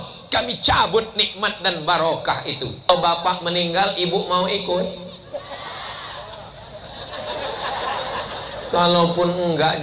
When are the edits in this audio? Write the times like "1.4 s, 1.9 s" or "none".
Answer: 2.9 s